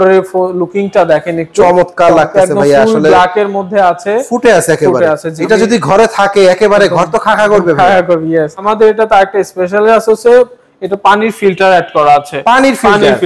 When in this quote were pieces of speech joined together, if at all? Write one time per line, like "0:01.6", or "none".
0:05.3
0:08.7